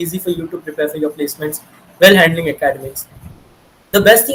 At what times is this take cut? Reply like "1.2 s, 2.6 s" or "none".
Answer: none